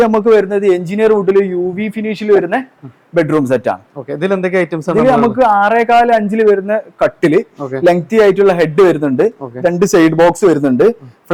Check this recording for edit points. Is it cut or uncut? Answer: uncut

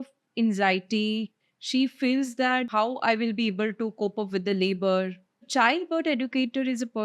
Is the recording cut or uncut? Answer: cut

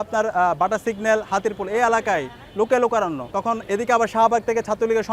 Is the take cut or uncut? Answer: uncut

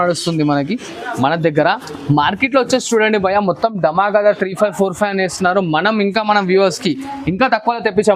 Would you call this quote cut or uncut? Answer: uncut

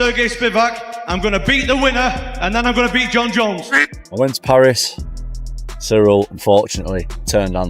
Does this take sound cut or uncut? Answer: cut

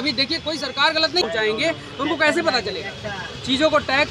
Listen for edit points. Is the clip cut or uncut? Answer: cut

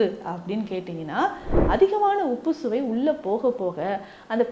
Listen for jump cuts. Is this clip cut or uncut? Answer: cut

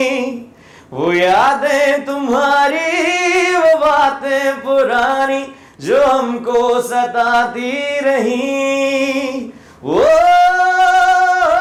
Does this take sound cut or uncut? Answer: uncut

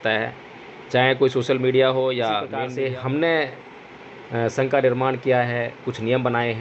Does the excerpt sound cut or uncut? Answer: cut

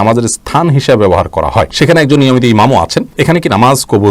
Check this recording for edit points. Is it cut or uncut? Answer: cut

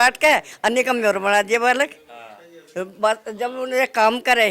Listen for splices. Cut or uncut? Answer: uncut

